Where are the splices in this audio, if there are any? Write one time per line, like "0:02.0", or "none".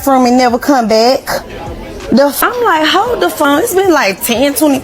0:02.4